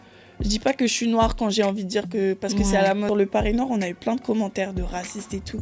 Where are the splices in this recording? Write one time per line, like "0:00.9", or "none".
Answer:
0:03.0